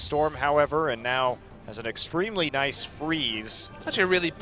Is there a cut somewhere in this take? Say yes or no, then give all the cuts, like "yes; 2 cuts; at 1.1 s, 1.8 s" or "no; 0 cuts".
yes; 1 cut; at 2.5 s